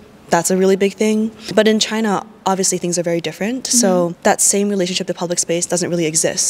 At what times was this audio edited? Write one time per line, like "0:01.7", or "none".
0:01.5
0:04.1